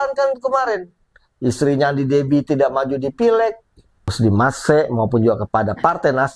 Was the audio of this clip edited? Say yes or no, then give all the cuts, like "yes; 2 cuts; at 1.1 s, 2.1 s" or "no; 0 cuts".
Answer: yes; 1 cut; at 4.1 s